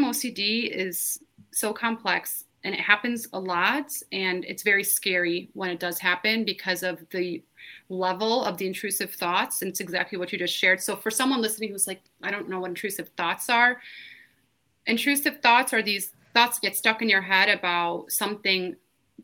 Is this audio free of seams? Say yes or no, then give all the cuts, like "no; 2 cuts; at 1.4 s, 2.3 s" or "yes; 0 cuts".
yes; 0 cuts